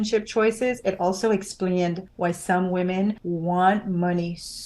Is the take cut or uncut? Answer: cut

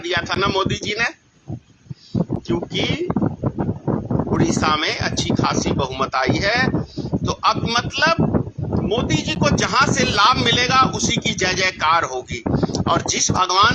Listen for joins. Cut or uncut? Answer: uncut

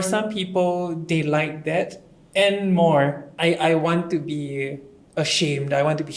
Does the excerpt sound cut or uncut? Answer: cut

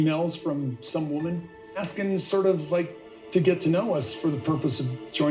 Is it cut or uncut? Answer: uncut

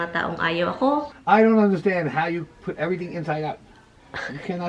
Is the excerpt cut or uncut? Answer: cut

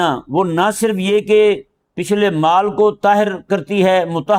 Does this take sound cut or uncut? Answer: uncut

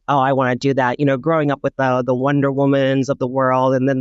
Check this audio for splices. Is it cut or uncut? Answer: uncut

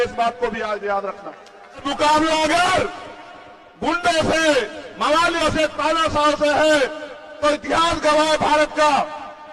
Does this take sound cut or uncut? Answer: cut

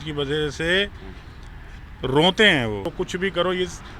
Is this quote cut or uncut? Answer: cut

